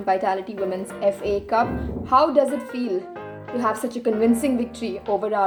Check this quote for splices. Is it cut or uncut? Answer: uncut